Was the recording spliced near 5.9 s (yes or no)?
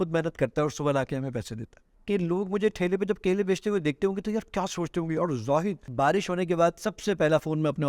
yes